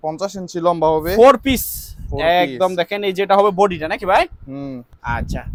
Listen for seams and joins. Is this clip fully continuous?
yes; 0 cuts

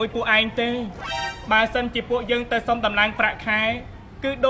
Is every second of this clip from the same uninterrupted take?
yes; 0 cuts

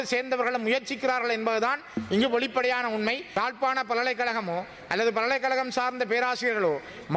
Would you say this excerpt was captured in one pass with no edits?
no; 1 cut; at 3.3 s

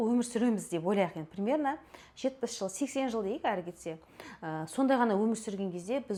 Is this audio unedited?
yes; 0 cuts

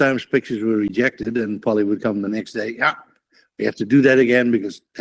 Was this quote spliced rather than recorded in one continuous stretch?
no; 0 cuts

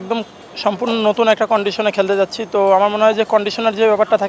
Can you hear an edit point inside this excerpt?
no; 0 cuts

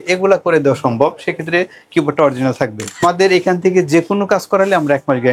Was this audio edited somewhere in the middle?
yes; 1 cut; at 3.0 s

